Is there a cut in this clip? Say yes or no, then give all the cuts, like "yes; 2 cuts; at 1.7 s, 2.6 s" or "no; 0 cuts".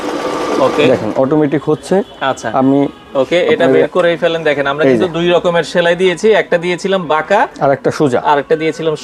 no; 0 cuts